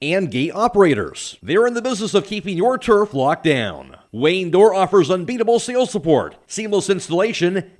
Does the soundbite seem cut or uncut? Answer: uncut